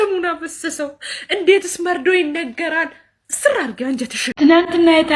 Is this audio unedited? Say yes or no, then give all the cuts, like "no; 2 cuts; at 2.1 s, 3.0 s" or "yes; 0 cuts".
no; 1 cut; at 4.2 s